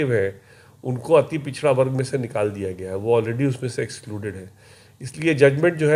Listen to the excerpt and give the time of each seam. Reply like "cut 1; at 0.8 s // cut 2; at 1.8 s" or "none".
none